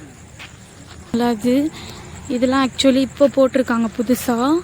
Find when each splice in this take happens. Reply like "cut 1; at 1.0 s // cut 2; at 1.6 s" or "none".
cut 1; at 1.1 s

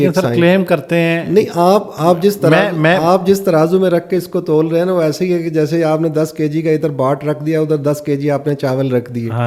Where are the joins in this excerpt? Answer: none

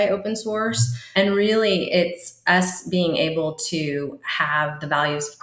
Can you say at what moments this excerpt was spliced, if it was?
cut 1; at 1.1 s

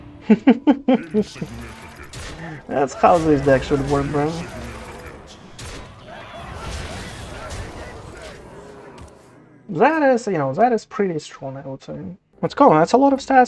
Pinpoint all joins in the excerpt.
cut 1; at 12.2 s

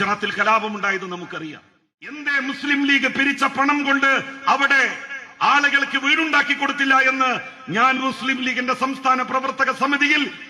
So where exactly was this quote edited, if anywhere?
cut 1; at 2.3 s

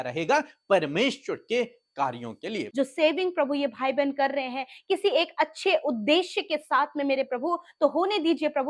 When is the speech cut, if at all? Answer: cut 1; at 2.7 s

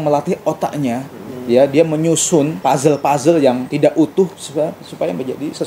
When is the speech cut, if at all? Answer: cut 1; at 2.5 s // cut 2; at 3.7 s

